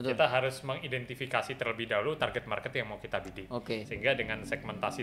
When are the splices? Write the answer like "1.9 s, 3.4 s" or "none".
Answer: 3.9 s